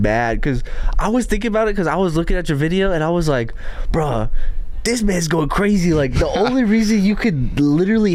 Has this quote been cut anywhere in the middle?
no; 0 cuts

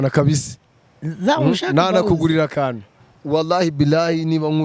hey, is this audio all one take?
no; 1 cut; at 2.9 s

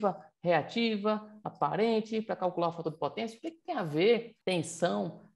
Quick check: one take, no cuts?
no; 1 cut; at 4.3 s

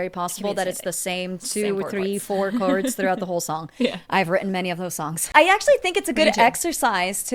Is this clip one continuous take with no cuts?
no; 1 cut; at 5.3 s

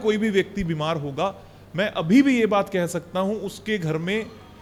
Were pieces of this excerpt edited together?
no; 0 cuts

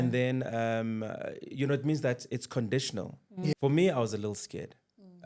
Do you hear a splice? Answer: yes; 1 cut; at 3.5 s

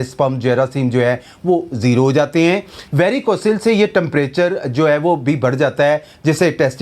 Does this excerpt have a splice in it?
yes; 1 cut; at 2.8 s

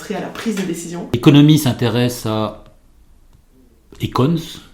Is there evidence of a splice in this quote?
yes; 1 cut; at 1.1 s

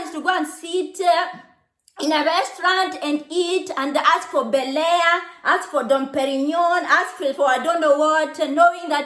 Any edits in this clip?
no; 0 cuts

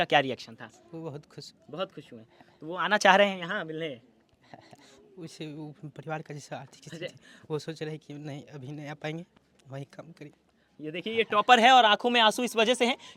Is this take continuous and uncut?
yes; 0 cuts

